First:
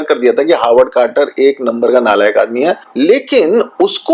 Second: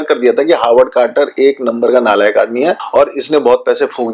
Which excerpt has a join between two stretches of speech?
first; 1 cut; at 2.8 s

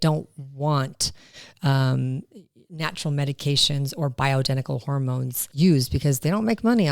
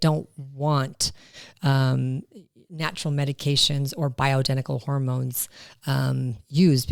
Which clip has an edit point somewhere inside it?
first; 1 cut; at 5.4 s

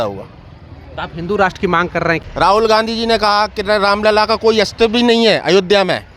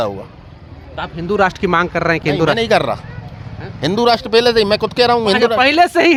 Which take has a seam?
first; 1 cut; at 2.2 s

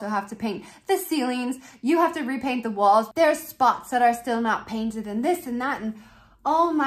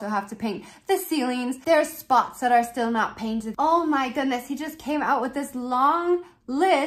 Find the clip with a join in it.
second; 2 cuts; at 1.6 s, 3.5 s

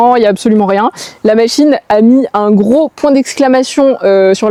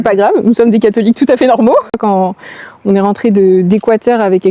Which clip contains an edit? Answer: second; 1 cut; at 1.9 s

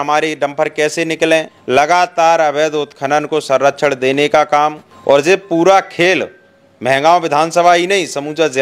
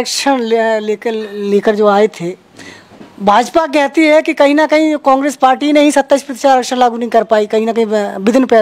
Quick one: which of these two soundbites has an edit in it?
first; 2 cuts; at 1.5 s, 4.9 s

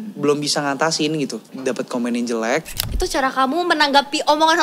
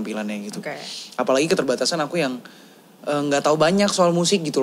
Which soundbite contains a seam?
first; 2 cuts; at 1.5 s, 2.8 s

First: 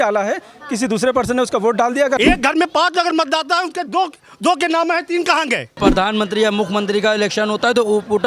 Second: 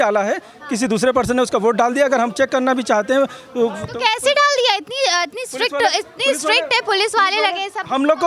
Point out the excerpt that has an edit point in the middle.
first; 2 cuts; at 2.2 s, 5.8 s

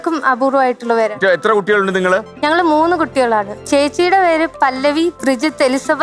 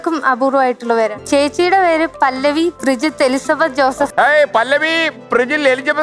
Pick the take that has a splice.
second; 2 cuts; at 1.2 s, 4.1 s

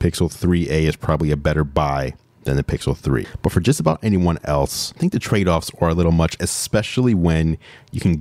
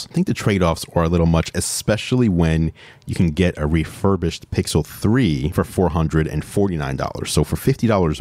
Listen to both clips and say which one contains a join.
first; 1 cut; at 3.3 s

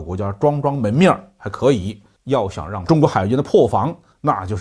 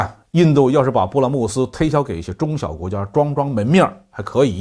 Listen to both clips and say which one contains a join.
first; 1 cut; at 2.8 s

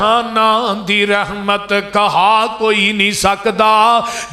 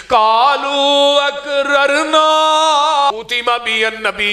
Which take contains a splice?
second; 1 cut; at 3.1 s

